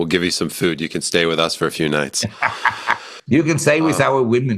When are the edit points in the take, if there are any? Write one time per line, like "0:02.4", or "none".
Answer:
0:03.1